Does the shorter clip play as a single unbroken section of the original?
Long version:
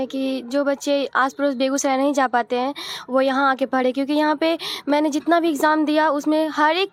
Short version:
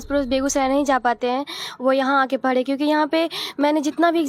yes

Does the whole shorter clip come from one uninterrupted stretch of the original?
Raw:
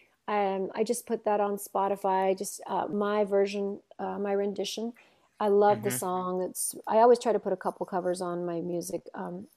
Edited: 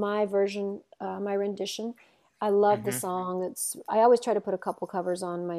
yes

